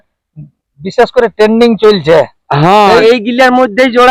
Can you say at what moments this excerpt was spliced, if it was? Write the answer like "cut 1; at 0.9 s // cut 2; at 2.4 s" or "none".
cut 1; at 3.0 s